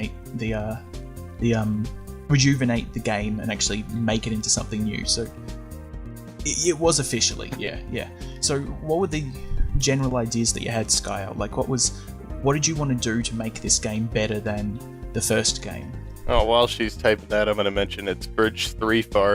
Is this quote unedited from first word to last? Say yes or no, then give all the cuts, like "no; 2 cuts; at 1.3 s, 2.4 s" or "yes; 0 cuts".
yes; 0 cuts